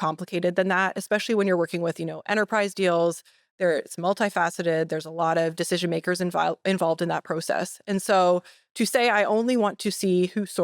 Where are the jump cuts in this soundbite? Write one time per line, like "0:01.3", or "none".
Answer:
none